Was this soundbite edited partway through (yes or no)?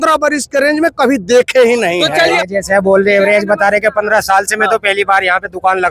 yes